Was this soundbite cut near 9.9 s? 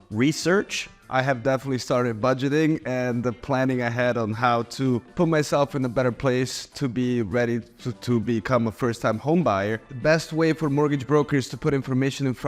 yes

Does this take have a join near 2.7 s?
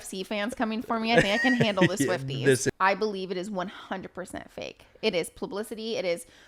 yes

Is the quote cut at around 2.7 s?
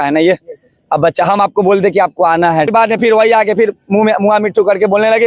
yes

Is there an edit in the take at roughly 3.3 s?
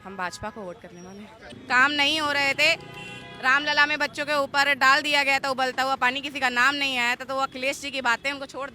no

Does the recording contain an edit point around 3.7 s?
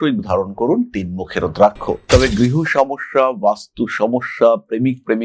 no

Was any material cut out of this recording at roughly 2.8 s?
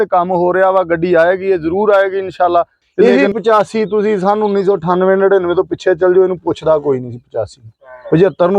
yes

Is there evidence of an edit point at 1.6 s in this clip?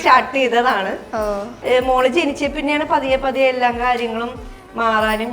yes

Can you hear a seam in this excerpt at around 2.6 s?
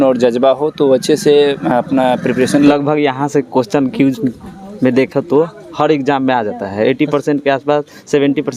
yes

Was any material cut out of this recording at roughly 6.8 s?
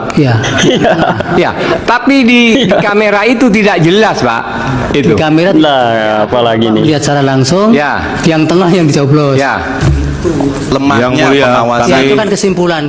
no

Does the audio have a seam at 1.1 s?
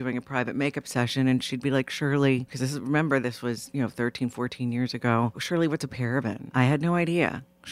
no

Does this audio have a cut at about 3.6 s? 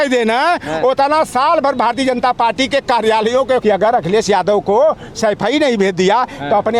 yes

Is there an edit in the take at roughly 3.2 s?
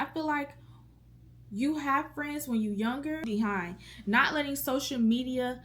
yes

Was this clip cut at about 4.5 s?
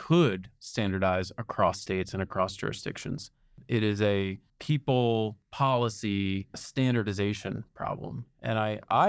yes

